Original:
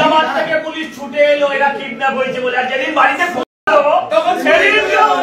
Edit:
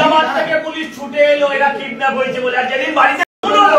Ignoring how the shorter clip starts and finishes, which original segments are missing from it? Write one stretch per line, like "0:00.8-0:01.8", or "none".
none